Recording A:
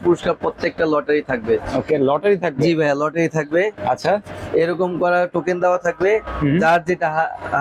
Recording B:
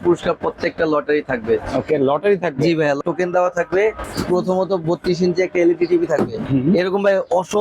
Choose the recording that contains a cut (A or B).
B